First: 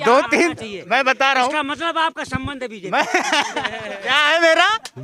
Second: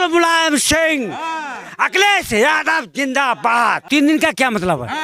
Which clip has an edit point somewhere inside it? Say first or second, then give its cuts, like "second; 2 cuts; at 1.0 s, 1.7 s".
second; 1 cut; at 3.9 s